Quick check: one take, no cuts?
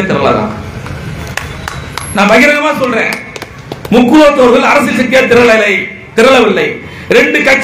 yes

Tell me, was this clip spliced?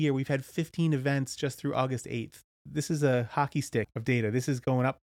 yes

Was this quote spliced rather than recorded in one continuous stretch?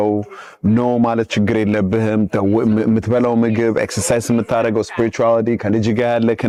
no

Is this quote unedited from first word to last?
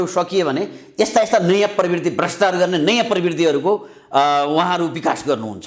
yes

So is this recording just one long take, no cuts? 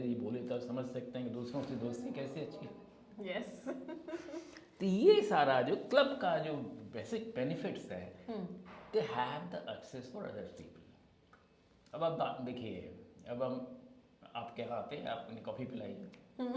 yes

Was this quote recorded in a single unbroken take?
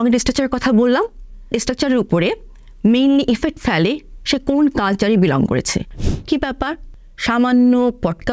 no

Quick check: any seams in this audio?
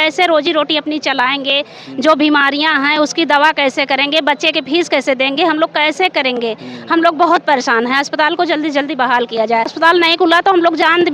yes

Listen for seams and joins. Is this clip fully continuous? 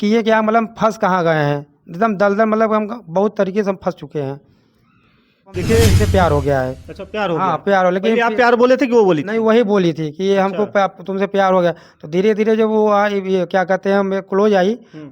no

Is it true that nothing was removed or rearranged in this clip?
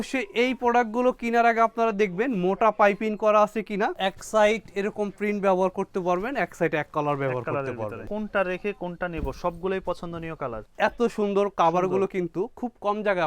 no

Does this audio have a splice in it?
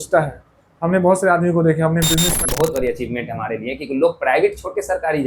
yes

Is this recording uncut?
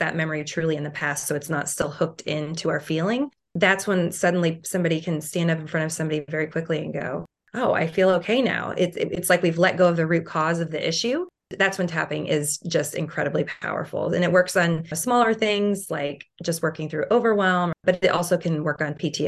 no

